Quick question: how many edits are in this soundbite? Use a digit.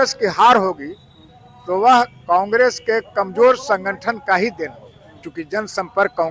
1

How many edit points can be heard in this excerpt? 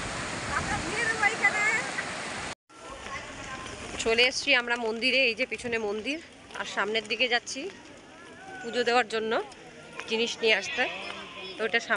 1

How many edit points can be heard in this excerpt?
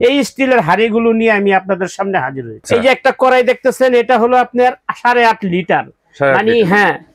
1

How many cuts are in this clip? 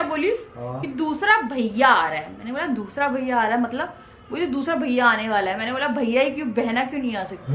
0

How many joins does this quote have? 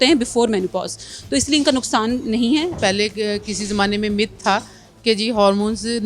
1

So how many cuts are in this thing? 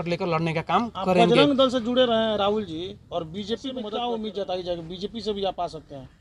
1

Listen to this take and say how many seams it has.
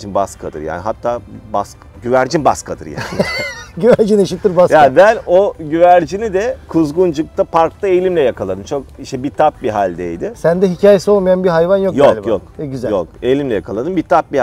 0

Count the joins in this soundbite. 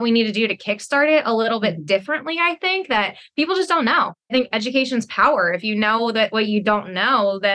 1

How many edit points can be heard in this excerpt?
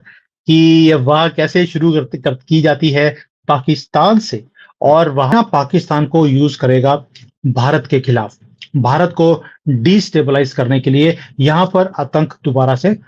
1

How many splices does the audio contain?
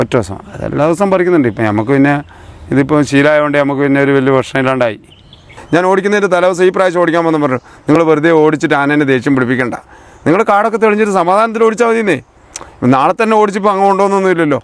1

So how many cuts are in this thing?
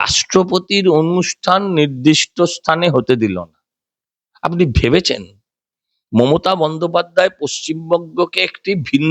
0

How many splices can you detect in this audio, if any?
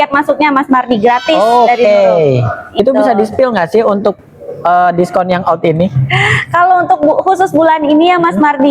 1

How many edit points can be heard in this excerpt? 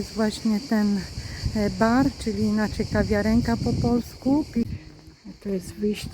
1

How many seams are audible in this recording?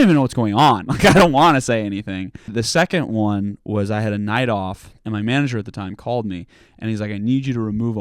2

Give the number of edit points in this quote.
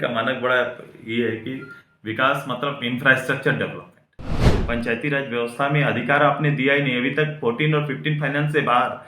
1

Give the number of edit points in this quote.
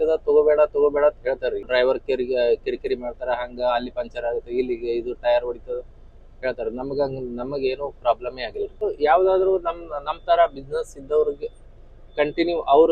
2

